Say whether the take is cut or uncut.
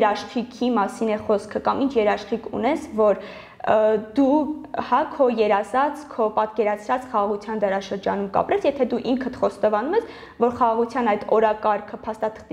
uncut